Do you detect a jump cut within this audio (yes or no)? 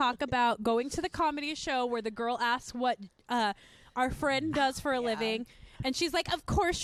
no